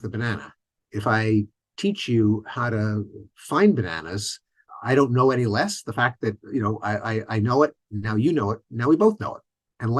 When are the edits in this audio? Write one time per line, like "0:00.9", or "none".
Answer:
none